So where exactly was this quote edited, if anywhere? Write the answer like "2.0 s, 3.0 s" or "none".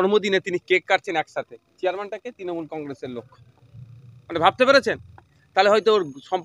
none